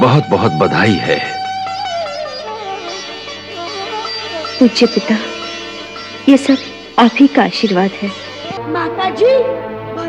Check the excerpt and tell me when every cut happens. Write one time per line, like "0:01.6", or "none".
0:08.5